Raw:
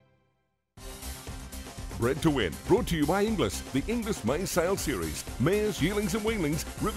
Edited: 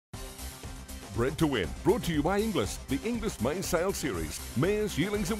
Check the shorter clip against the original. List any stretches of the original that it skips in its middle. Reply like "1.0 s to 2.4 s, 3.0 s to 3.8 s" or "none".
1.8 s to 2.0 s